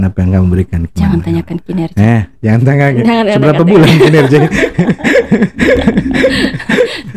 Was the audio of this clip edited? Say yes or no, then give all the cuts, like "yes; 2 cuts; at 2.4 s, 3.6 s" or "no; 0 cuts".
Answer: no; 0 cuts